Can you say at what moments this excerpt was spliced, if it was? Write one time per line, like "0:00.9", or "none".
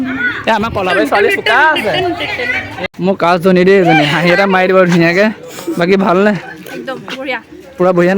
0:02.7